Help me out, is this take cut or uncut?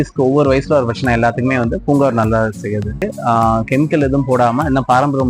cut